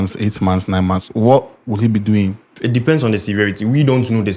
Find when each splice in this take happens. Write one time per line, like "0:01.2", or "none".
0:02.5